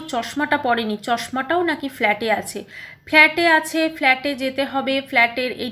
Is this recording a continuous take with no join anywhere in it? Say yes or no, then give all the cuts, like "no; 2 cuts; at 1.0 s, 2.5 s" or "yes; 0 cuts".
yes; 0 cuts